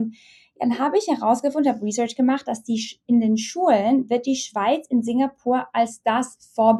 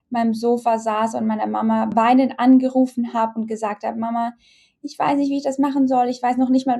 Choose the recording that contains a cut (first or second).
second